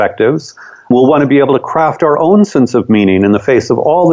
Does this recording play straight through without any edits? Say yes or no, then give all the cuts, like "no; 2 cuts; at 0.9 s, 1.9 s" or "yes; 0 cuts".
no; 1 cut; at 0.9 s